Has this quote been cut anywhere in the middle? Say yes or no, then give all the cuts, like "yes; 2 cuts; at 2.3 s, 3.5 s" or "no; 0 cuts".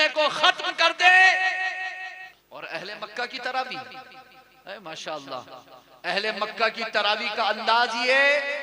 yes; 1 cut; at 2.3 s